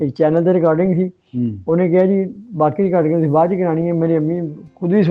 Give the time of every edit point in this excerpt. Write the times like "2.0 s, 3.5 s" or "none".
none

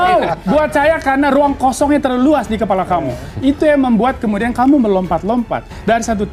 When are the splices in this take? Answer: none

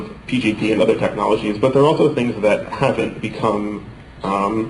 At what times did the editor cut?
1.7 s

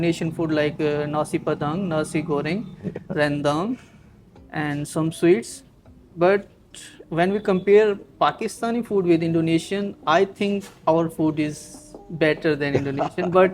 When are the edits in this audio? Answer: none

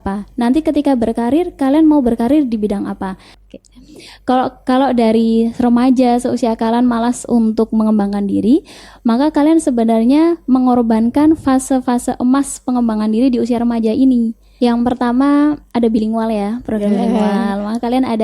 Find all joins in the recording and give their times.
3.3 s, 14.4 s

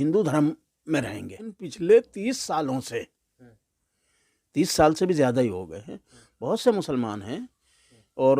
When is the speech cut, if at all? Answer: 1.7 s

